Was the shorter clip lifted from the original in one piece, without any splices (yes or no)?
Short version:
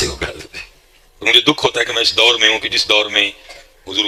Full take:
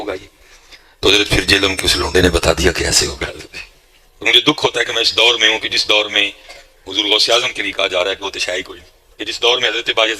yes